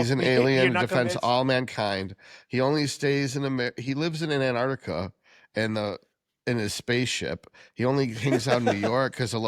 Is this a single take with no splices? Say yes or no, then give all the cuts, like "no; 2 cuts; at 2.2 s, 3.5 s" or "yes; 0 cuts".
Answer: yes; 0 cuts